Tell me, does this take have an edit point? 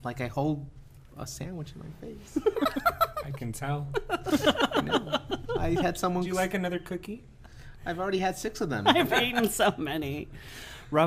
yes; 1 cut; at 2.4 s

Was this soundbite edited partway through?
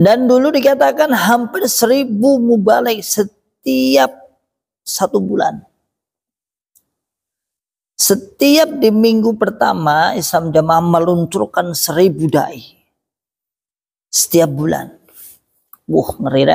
no; 0 cuts

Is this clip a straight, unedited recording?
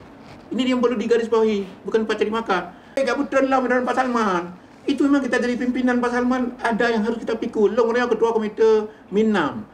no; 1 cut; at 3.0 s

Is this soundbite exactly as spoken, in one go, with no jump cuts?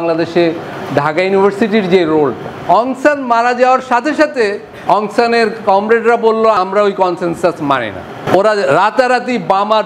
no; 4 cuts; at 2.5 s, 4.7 s, 6.6 s, 8.3 s

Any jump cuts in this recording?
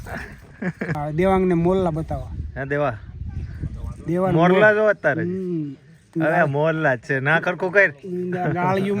yes; 1 cut; at 1.0 s

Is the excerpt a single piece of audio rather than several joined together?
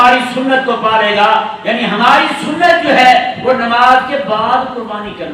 yes; 0 cuts

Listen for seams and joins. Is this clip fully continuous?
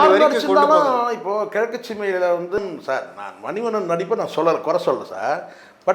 no; 1 cut; at 2.6 s

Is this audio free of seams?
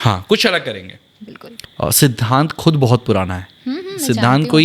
no; 1 cut; at 1.6 s

